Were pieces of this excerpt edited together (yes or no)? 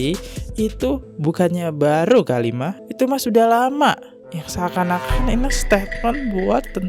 no